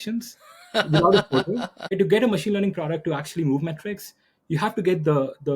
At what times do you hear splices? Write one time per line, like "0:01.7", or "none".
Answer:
0:01.9